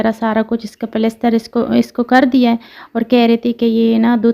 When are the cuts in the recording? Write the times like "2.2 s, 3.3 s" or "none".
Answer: none